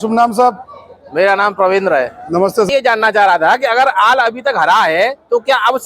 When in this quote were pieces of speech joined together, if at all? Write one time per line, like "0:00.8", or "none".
0:02.7